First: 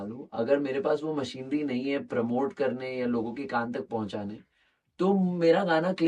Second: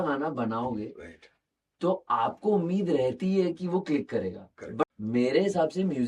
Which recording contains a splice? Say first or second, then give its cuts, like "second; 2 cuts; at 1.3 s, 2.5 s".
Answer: second; 1 cut; at 4.8 s